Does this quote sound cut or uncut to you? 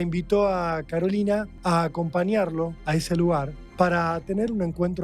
cut